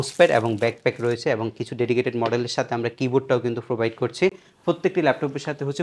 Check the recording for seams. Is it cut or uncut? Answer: uncut